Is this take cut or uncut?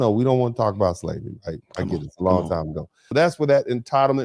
cut